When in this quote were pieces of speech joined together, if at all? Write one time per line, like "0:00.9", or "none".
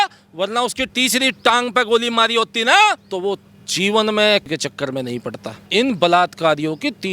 0:04.4